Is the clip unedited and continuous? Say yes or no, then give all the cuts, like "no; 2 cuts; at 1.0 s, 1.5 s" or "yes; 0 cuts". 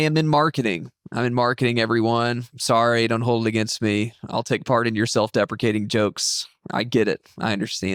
yes; 0 cuts